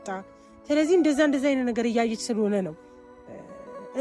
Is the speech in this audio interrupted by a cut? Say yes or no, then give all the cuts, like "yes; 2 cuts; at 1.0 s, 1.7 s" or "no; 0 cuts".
no; 0 cuts